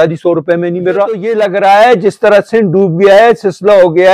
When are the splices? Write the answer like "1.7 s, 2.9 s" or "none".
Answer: 1.3 s